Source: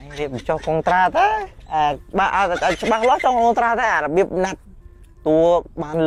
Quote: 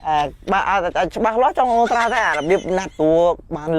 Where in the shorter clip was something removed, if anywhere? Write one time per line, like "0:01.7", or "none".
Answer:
0:02.9